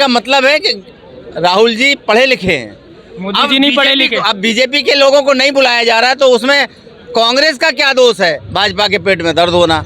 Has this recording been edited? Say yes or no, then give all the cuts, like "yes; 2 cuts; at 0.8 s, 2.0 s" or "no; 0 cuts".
yes; 1 cut; at 8.4 s